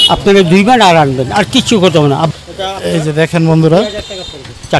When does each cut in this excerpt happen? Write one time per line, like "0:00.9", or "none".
0:02.3